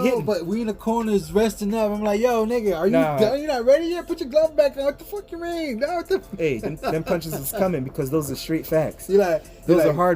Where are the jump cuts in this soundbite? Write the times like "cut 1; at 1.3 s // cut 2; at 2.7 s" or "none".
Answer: none